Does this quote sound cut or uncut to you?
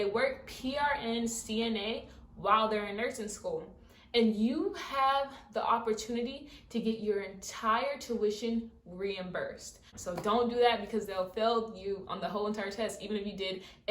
cut